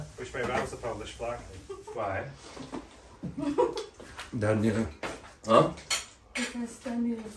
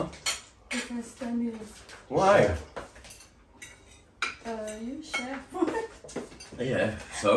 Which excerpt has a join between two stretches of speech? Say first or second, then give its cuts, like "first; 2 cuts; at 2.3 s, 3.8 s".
first; 1 cut; at 1.7 s